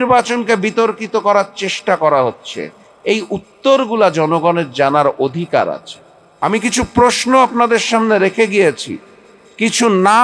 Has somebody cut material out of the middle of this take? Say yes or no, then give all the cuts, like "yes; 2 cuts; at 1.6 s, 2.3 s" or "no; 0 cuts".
yes; 1 cut; at 6.3 s